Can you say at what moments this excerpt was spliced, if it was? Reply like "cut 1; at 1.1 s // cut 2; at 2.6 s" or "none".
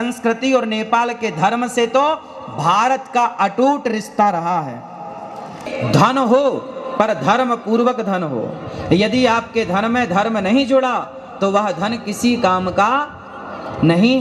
cut 1; at 5.7 s